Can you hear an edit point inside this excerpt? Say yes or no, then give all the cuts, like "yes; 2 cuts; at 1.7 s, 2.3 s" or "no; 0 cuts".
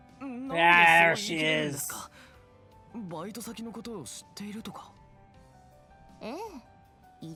no; 0 cuts